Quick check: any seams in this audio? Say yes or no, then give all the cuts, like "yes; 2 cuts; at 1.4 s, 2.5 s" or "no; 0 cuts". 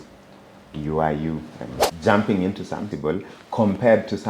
yes; 2 cuts; at 1.8 s, 2.9 s